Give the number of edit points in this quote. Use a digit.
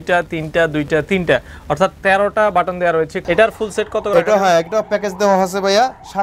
1